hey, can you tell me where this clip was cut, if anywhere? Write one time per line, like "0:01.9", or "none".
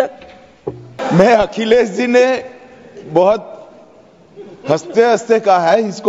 0:00.9